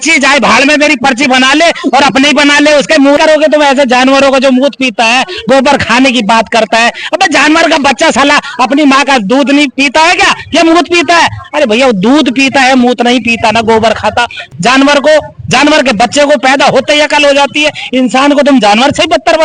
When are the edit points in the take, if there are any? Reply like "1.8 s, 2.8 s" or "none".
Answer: 3.2 s, 14.5 s